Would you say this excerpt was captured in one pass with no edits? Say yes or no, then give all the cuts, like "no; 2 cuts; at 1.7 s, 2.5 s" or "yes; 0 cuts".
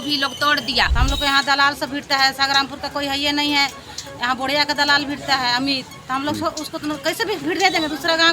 no; 1 cut; at 0.9 s